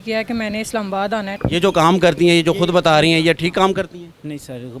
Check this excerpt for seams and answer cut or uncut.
cut